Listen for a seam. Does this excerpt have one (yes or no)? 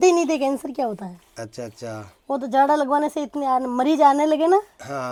no